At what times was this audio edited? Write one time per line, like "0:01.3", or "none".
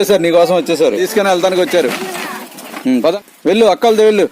0:01.0
0:03.2